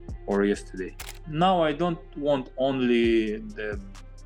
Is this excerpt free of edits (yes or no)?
no